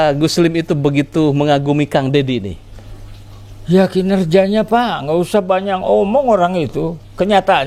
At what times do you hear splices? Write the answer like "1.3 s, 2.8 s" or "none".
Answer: none